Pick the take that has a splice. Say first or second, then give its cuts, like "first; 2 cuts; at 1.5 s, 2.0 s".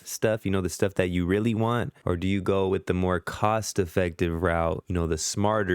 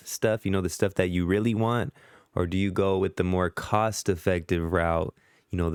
first; 2 cuts; at 1.9 s, 4.8 s